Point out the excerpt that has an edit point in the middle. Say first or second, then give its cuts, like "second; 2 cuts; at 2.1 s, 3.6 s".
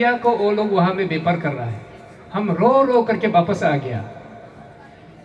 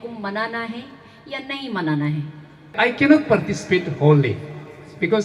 second; 1 cut; at 2.7 s